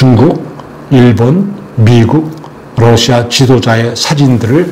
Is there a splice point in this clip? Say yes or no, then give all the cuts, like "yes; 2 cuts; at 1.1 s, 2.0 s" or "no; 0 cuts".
no; 0 cuts